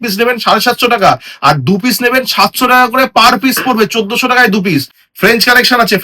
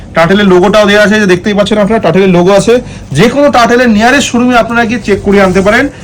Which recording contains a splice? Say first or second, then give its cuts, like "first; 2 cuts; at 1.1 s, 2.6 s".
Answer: first; 1 cut; at 5.0 s